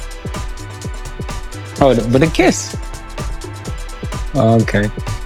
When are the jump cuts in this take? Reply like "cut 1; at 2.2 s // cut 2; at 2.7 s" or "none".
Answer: cut 1; at 1.5 s